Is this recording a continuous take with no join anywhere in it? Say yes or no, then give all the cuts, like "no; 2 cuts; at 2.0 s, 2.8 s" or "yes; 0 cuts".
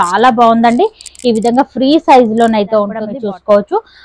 no; 1 cut; at 3.1 s